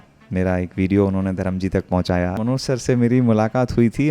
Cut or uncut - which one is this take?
cut